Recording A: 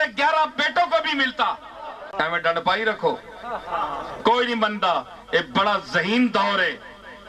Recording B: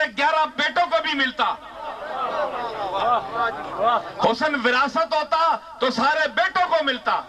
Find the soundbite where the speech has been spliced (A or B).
A